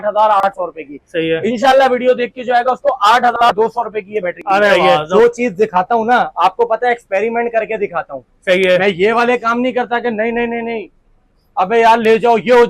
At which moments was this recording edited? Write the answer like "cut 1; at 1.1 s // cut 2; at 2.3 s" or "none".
cut 1; at 4.9 s